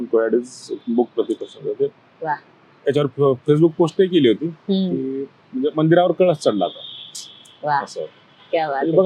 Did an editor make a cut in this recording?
no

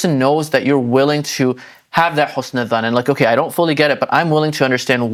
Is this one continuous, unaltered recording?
yes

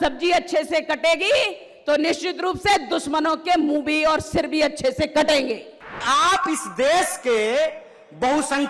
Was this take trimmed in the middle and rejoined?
yes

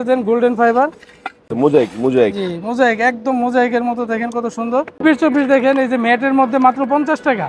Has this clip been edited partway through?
yes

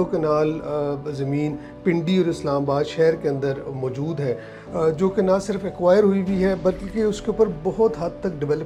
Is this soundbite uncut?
yes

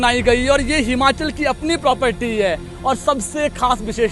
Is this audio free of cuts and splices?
no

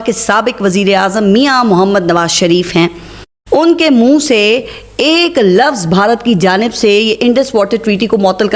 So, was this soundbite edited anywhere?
no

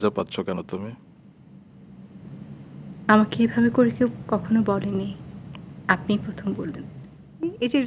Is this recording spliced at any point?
no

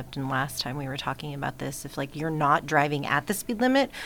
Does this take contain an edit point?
no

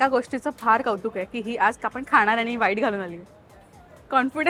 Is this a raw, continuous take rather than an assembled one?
yes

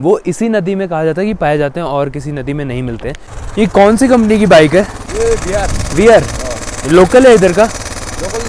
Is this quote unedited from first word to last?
no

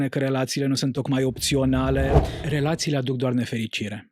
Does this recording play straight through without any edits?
no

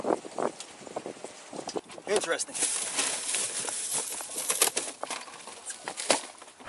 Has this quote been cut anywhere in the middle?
yes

